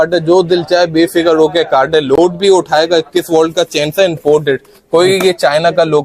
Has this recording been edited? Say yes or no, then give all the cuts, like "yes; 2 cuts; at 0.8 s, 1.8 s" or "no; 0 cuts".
no; 0 cuts